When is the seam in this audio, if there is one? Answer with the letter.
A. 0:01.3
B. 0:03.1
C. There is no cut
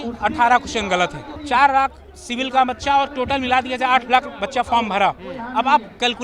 A